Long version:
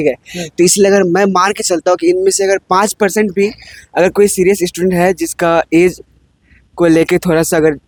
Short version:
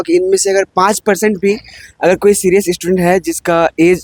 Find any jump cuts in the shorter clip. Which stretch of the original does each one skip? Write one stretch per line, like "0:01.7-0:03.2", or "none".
none